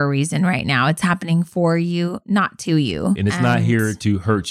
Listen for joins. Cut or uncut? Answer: cut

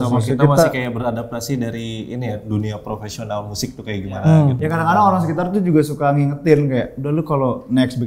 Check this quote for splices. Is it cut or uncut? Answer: cut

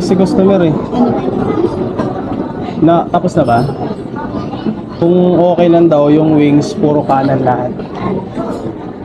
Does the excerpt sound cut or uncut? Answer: uncut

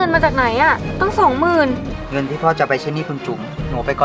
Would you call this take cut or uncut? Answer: cut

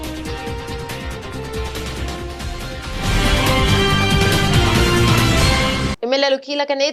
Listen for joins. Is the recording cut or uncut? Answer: cut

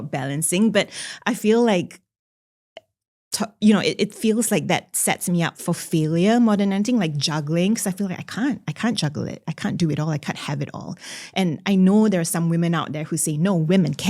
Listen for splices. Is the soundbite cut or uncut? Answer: uncut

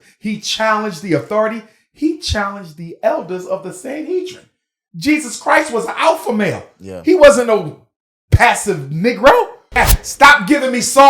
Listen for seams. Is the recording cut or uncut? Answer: cut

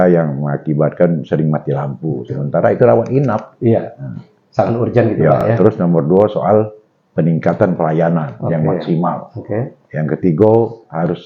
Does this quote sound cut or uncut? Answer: uncut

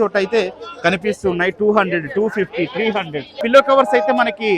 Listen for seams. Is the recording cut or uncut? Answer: cut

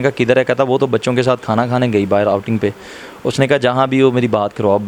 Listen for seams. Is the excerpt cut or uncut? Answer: uncut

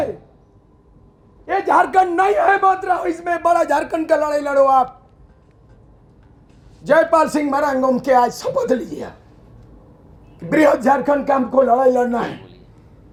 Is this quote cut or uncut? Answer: uncut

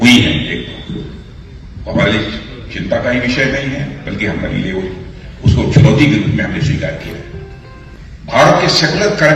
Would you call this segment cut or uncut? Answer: cut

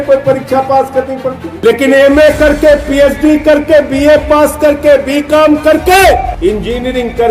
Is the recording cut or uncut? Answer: cut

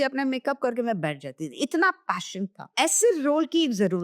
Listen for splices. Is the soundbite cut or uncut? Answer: cut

